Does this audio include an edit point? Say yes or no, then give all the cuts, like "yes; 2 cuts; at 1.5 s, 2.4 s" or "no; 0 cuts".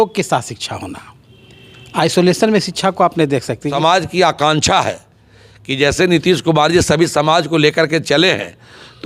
yes; 1 cut; at 3.7 s